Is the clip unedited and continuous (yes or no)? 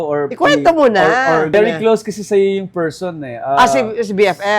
no